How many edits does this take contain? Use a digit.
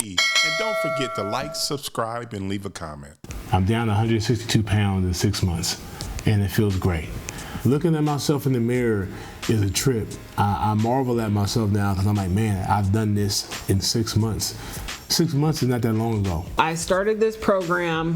1